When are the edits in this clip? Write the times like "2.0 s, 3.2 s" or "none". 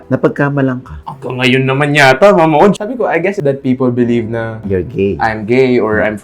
0.9 s, 3.0 s